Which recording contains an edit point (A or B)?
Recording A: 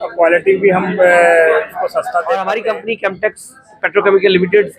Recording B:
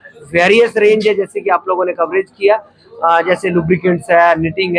A